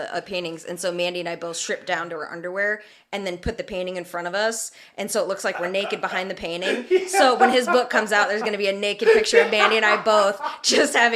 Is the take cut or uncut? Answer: uncut